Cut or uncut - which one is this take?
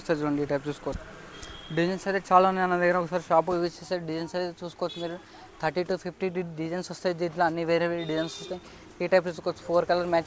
uncut